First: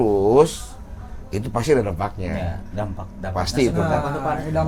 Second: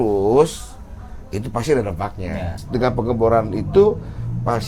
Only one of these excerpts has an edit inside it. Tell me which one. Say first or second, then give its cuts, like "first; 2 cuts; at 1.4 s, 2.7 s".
second; 1 cut; at 2.5 s